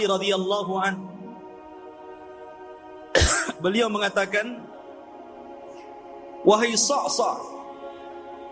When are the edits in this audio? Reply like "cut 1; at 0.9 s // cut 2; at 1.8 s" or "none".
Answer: none

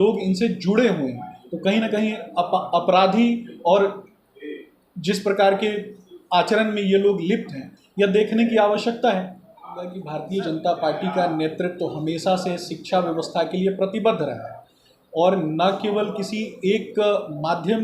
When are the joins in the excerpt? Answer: cut 1; at 10.0 s

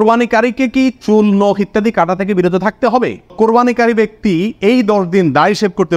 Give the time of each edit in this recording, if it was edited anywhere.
cut 1; at 3.3 s

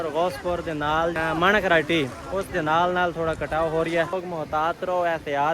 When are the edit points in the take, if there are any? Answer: cut 1; at 1.1 s // cut 2; at 4.1 s

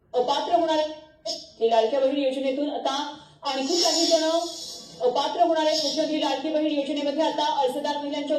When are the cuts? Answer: cut 1; at 0.9 s

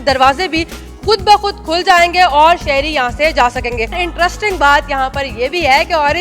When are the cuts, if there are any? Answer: cut 1; at 3.9 s

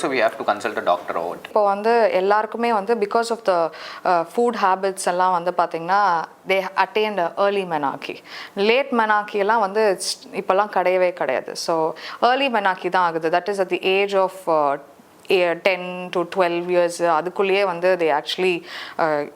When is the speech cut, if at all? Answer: cut 1; at 1.5 s

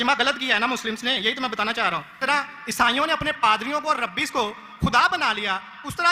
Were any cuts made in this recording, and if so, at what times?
cut 1; at 2.2 s

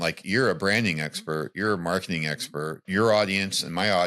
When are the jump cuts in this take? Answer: cut 1; at 2.8 s

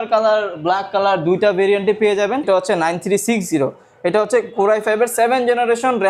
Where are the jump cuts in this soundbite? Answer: cut 1; at 2.4 s

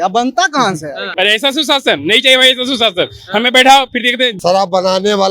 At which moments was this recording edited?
cut 1; at 1.0 s // cut 2; at 4.3 s

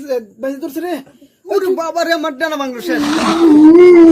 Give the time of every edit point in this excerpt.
cut 1; at 3.1 s

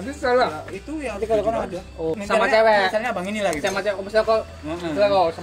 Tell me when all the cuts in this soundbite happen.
cut 1; at 2.1 s

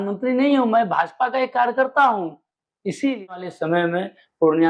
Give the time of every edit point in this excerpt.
cut 1; at 3.5 s

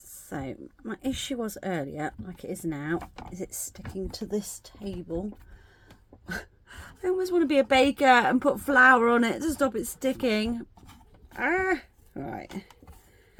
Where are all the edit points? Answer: none

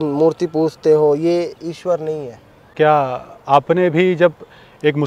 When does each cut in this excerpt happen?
cut 1; at 2.7 s

